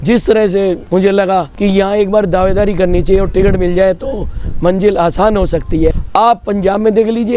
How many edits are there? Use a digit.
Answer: 3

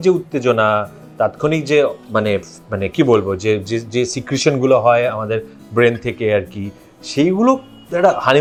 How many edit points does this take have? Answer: 0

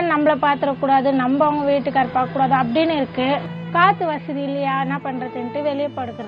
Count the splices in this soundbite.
1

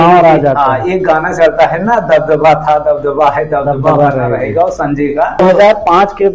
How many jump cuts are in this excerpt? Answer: 1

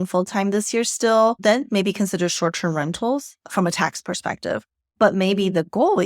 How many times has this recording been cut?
1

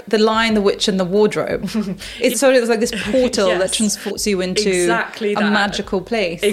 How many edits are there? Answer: 2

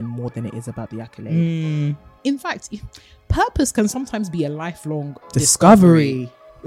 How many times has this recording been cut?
1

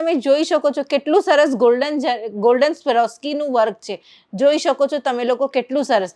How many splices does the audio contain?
0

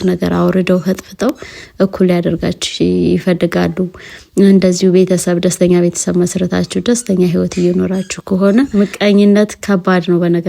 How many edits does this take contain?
1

